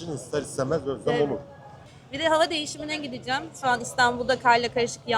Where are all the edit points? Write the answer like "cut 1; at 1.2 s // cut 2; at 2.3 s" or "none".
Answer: cut 1; at 1.8 s